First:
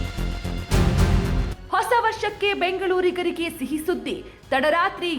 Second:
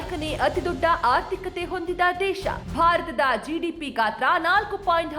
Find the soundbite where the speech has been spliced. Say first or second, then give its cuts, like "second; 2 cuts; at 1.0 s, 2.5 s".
first; 1 cut; at 1.6 s